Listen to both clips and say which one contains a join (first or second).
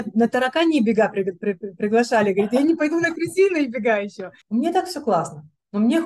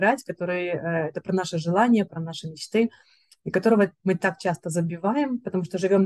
first